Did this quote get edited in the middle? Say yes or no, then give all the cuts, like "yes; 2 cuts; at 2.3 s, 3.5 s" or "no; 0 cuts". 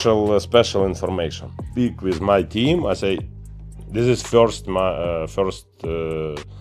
yes; 1 cut; at 1.7 s